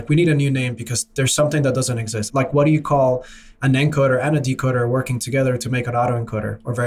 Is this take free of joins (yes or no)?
no